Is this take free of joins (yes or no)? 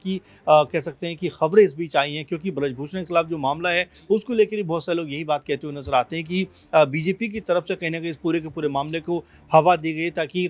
yes